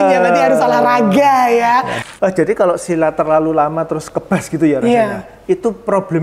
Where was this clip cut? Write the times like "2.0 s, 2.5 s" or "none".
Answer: 2.0 s